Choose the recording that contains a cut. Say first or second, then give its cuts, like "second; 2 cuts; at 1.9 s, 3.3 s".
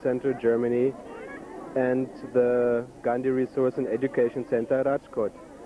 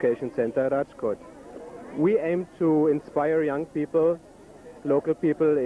second; 1 cut; at 2.8 s